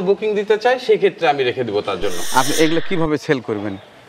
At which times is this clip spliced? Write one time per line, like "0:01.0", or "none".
0:02.2

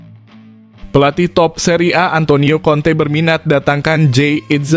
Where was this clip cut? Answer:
0:00.9

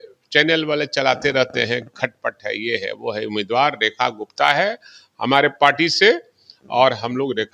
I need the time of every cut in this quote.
none

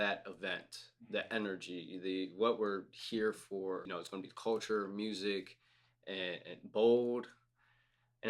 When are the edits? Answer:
0:03.9

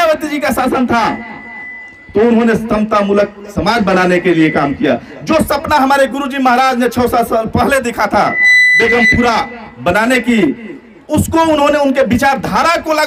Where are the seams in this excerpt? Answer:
none

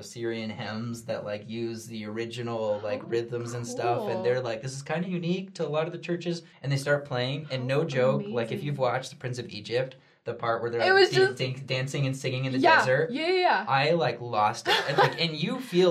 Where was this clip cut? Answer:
0:06.5
0:14.9

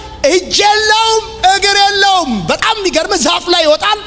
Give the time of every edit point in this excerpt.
none

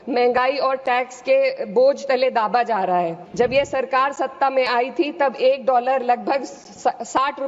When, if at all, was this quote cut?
0:03.2

